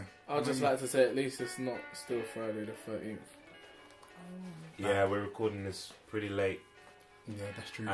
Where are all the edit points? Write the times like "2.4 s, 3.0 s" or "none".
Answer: 4.6 s